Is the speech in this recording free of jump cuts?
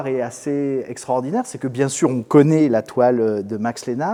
yes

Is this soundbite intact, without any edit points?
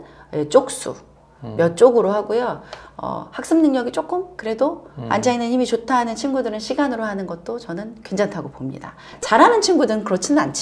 no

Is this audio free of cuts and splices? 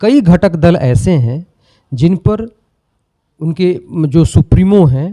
yes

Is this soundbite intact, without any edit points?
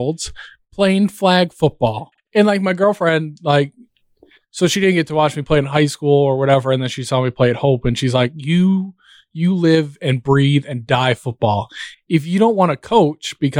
no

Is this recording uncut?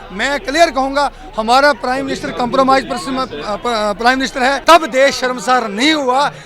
no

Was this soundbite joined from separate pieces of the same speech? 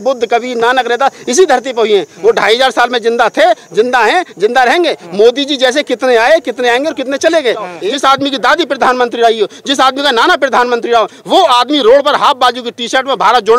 yes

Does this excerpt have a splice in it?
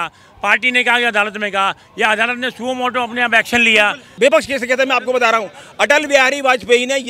yes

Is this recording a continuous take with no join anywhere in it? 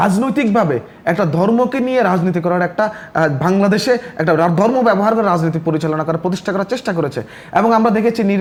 yes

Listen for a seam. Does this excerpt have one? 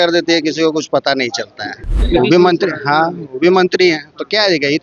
yes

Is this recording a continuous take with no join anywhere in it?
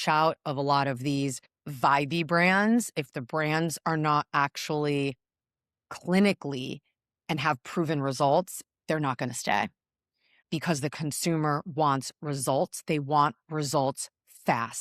yes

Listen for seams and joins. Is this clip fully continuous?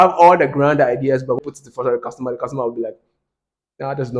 no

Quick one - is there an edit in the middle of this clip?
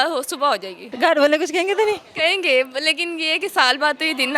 yes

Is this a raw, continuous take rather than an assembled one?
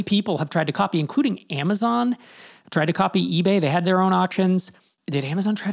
yes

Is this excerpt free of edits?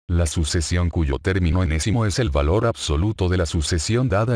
no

